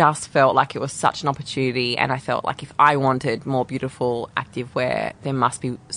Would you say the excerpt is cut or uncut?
cut